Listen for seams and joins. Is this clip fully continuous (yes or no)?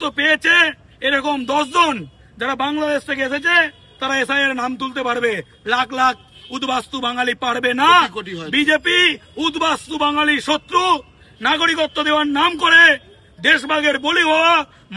yes